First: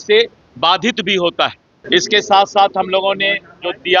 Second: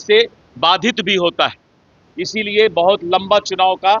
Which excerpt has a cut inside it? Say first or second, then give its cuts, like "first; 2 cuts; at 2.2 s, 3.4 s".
first; 1 cut; at 1.8 s